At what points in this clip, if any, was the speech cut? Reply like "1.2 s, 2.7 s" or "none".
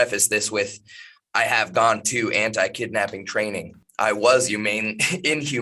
3.8 s